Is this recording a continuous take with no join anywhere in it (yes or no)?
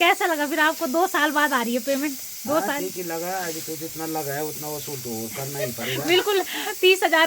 yes